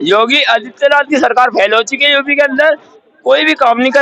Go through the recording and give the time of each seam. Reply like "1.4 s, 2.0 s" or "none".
none